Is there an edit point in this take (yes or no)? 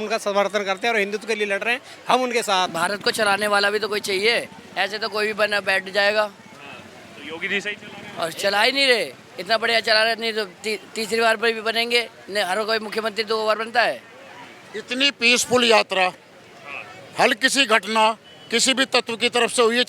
yes